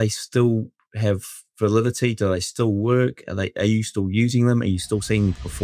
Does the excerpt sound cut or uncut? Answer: uncut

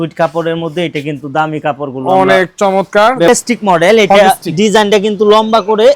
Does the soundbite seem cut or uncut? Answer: cut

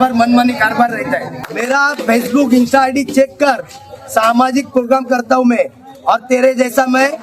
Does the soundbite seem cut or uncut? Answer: cut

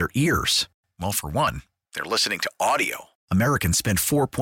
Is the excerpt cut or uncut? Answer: uncut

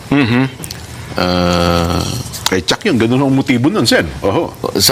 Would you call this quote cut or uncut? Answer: cut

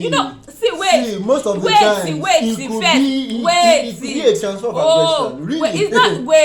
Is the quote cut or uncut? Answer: uncut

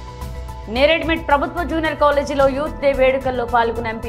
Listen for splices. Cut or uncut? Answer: uncut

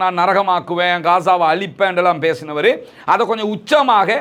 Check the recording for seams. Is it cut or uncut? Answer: uncut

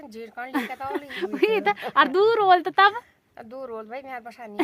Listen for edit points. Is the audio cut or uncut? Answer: uncut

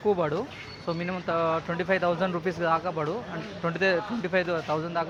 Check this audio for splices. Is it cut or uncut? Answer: uncut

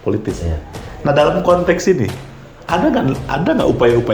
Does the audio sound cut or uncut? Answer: uncut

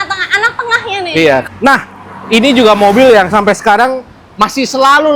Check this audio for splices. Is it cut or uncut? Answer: cut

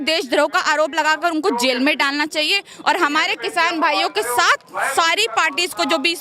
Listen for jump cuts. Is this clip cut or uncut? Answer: uncut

